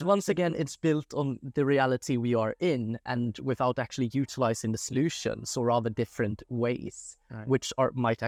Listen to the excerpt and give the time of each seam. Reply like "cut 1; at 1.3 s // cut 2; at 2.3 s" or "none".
none

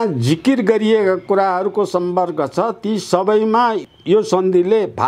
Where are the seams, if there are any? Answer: cut 1; at 3.8 s

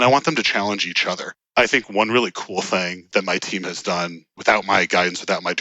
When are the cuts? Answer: cut 1; at 1.3 s // cut 2; at 3.1 s // cut 3; at 4.3 s

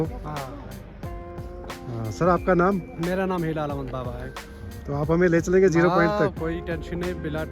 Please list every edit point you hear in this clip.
none

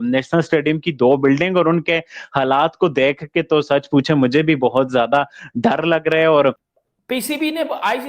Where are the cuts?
cut 1; at 6.7 s

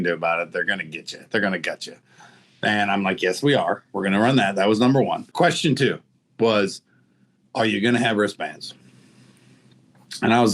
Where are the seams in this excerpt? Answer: cut 1; at 5.3 s

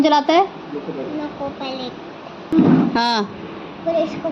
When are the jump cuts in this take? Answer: cut 1; at 2.5 s

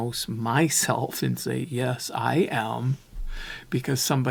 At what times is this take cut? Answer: none

